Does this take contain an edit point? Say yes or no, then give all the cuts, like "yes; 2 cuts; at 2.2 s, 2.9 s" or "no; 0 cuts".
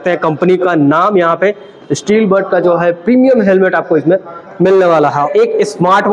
yes; 1 cut; at 5.2 s